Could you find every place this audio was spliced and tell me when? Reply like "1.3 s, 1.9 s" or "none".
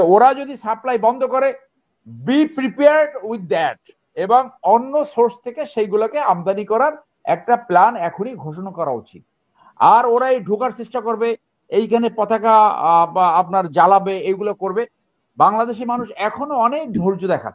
none